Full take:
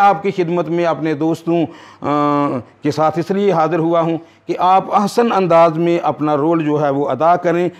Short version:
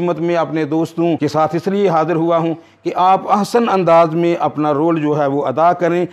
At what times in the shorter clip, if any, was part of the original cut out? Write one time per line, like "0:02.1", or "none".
0:01.2